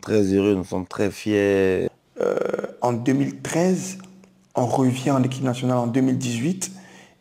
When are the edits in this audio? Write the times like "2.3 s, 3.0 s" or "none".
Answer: 1.9 s